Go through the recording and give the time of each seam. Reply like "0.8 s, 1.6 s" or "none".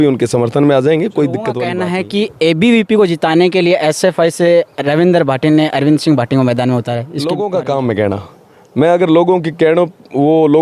1.7 s, 7.1 s